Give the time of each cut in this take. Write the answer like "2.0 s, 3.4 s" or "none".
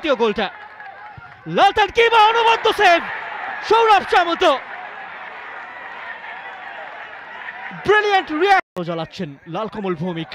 8.7 s